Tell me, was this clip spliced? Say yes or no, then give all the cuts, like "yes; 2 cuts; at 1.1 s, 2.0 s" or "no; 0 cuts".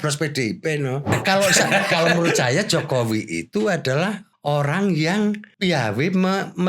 yes; 3 cuts; at 1.1 s, 4.3 s, 5.5 s